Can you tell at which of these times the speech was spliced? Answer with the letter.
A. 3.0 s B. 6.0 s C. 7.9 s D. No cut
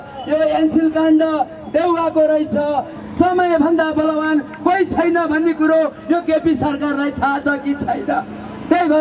A